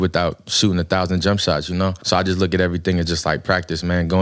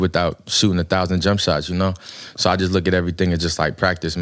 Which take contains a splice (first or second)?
first